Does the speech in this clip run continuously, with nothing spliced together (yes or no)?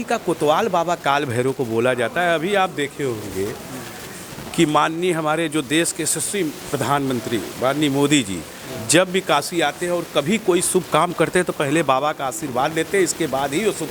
yes